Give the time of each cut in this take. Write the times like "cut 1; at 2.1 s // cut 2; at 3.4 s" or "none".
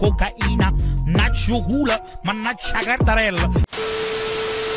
cut 1; at 3.6 s